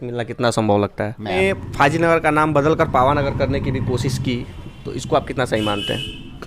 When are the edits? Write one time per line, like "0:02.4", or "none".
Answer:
0:01.3